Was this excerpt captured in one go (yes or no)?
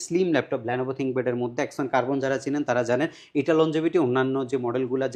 yes